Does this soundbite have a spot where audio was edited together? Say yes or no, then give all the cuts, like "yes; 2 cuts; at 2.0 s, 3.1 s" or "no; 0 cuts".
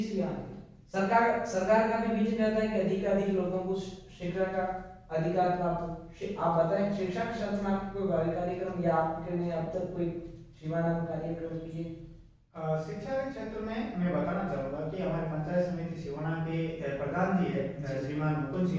no; 0 cuts